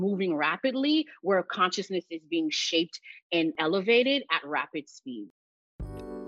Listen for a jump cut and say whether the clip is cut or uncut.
cut